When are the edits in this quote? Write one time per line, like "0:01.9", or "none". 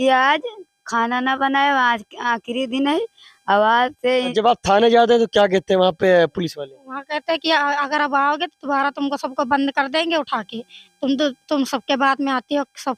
0:04.3